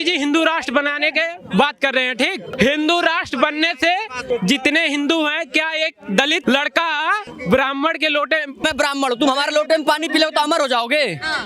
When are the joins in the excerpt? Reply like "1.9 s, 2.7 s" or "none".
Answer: 2.5 s, 4.2 s, 6.4 s, 7.3 s, 8.6 s